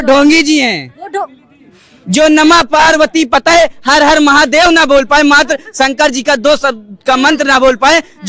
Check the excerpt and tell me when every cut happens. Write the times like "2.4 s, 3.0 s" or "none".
none